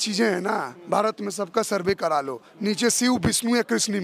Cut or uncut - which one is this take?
uncut